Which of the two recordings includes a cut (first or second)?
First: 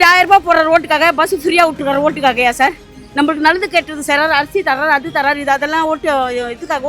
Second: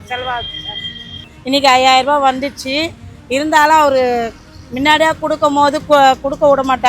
second